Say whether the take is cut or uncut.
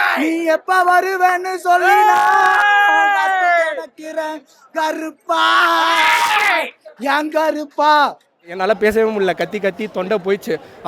cut